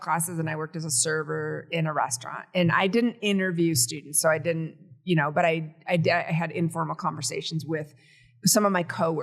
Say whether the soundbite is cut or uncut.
uncut